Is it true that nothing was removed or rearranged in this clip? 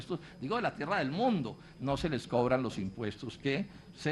no; 1 cut; at 1.5 s

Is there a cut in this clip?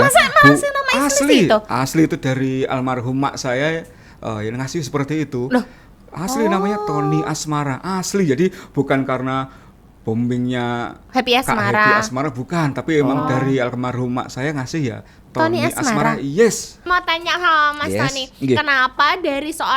yes; 1 cut; at 16.8 s

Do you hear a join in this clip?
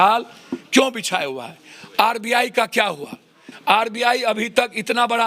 no; 0 cuts

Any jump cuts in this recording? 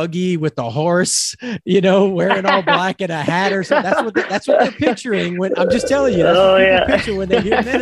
no; 0 cuts

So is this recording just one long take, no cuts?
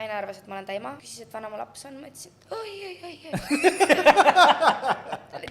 no; 1 cut; at 1.1 s

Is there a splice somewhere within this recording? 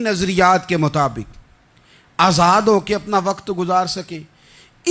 no; 0 cuts

